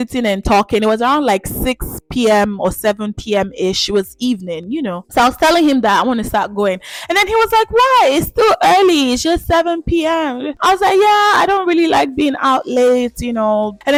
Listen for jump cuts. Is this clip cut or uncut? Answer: uncut